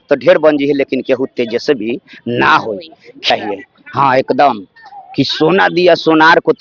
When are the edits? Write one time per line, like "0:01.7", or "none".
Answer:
0:03.3